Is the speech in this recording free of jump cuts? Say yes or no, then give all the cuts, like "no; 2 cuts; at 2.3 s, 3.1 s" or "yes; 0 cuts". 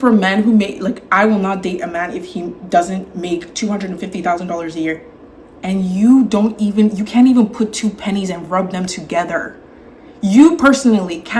yes; 0 cuts